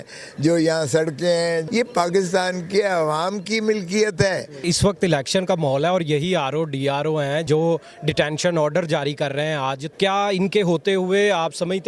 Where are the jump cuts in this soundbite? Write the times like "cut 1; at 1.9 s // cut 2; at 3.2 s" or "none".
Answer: cut 1; at 1.6 s // cut 2; at 4.7 s // cut 3; at 7.5 s // cut 4; at 9.8 s